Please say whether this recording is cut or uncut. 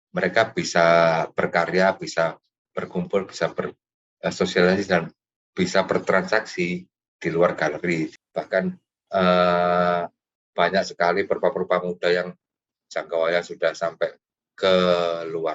cut